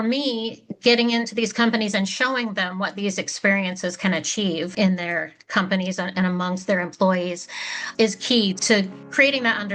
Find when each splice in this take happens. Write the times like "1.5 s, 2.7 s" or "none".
4.7 s, 7.8 s, 8.7 s